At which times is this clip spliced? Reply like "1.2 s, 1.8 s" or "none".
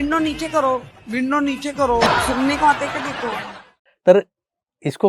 3.7 s